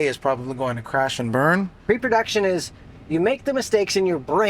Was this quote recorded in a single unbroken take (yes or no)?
no